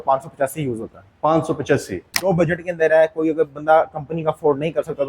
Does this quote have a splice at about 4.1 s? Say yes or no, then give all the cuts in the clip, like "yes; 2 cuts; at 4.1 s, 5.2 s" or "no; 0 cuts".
no; 1 cut; at 2.2 s